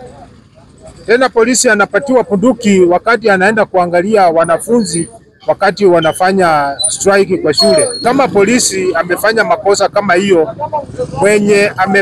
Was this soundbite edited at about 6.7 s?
no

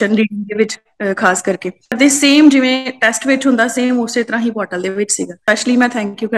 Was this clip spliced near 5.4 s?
yes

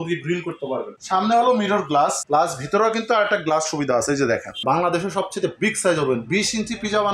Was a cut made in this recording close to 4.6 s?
yes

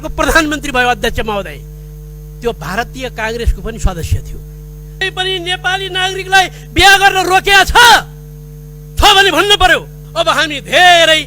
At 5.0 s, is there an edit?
yes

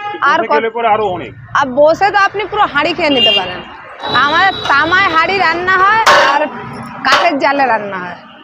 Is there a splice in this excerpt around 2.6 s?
no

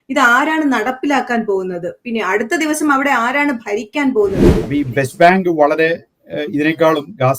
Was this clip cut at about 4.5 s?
yes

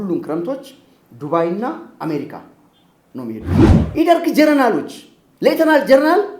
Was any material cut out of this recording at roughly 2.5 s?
no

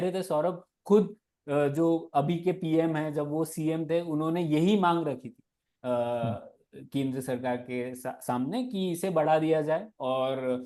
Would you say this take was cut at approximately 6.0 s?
no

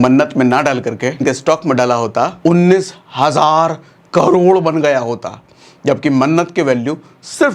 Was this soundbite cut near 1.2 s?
yes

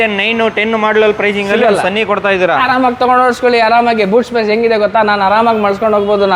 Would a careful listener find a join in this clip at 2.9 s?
no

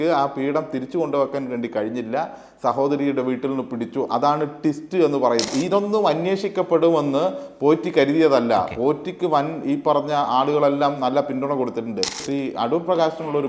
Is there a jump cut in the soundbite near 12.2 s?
yes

